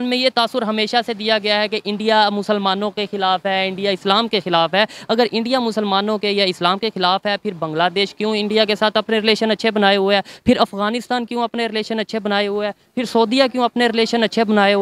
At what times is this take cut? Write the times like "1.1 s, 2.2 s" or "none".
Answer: none